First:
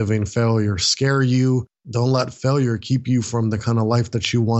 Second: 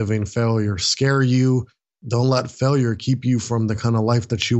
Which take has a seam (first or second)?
first